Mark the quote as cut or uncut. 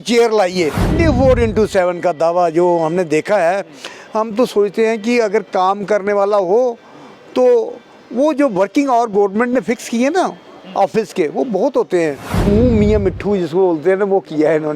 cut